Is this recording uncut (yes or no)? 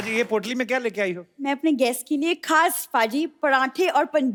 yes